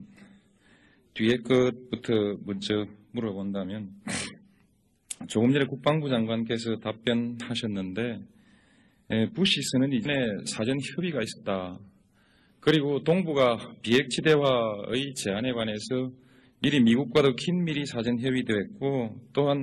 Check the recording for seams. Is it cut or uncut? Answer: cut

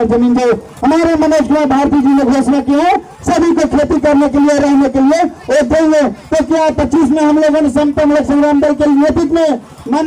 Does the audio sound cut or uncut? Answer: uncut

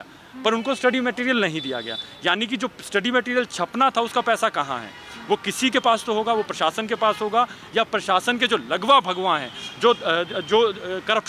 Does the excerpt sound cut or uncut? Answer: uncut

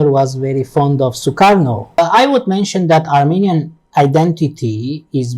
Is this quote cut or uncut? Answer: cut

